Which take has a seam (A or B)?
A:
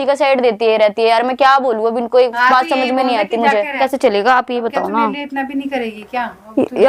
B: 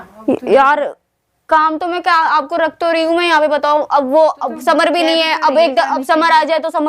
A